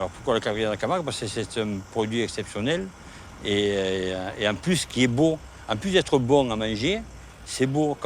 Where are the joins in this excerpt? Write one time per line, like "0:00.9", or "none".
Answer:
none